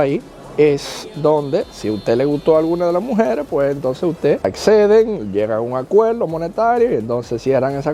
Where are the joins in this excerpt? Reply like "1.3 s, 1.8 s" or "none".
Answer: none